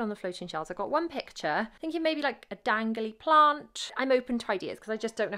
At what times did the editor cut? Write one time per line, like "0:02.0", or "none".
0:01.7
0:03.9